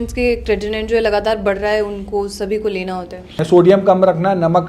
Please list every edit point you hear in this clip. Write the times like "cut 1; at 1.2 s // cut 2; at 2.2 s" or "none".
cut 1; at 3.4 s